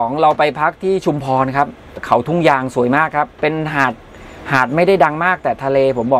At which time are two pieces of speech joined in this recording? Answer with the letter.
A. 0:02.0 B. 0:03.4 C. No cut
A